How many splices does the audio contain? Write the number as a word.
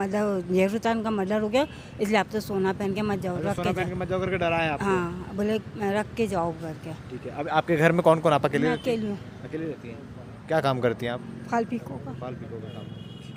zero